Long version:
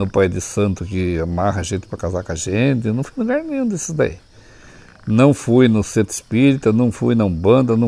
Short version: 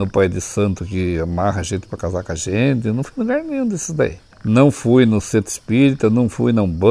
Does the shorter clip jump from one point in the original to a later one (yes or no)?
yes